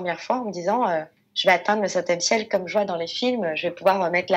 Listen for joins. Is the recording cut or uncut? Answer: uncut